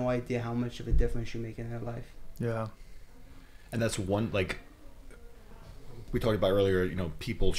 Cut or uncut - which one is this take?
uncut